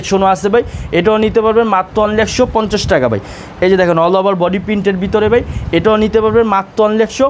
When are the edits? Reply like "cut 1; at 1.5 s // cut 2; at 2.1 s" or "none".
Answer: none